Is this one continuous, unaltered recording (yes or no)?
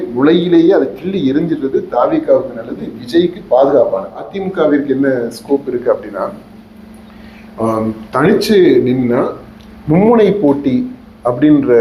no